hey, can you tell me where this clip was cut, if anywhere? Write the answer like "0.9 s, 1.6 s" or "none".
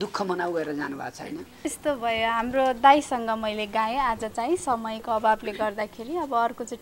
1.5 s